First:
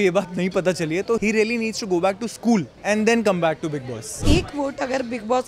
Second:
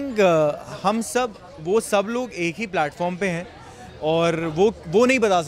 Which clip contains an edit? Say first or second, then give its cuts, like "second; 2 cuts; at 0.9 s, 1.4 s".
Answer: first; 3 cuts; at 1.2 s, 2.7 s, 4.2 s